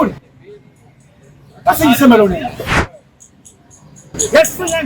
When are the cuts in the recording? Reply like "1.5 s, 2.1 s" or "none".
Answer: 2.8 s